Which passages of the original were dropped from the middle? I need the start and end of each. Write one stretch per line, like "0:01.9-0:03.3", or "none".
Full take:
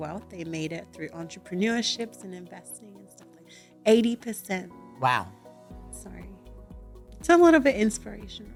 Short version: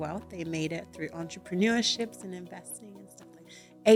none